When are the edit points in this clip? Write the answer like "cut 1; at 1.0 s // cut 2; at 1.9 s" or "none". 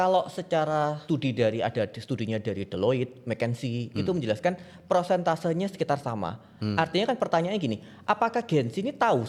cut 1; at 1.0 s